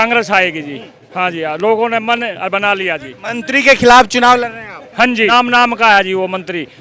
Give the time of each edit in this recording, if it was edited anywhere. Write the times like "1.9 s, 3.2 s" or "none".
5.3 s